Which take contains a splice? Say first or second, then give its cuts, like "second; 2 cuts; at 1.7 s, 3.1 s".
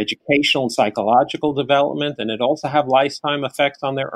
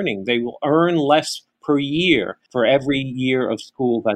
second; 1 cut; at 2.4 s